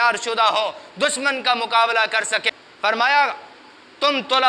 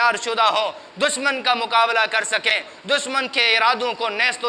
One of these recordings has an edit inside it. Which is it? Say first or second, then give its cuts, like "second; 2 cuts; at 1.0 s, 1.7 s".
first; 1 cut; at 2.6 s